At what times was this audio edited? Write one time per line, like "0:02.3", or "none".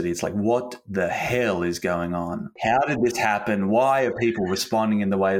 0:02.6